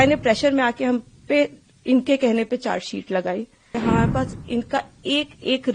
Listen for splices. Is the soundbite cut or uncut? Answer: cut